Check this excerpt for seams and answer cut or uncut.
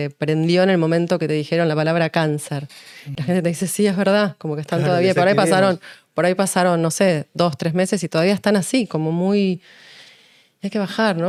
uncut